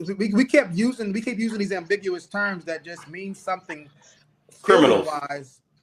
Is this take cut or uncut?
uncut